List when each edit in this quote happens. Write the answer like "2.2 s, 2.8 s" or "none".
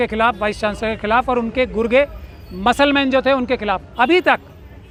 none